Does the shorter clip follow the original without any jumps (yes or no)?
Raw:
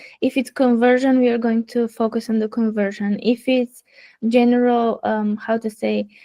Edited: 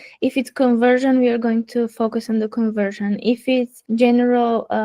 no